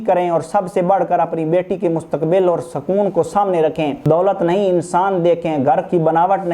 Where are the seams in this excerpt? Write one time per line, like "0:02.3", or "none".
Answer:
0:04.0